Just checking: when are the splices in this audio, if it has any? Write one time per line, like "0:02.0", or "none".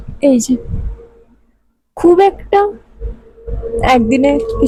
none